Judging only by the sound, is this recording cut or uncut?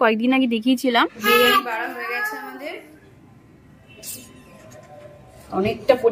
cut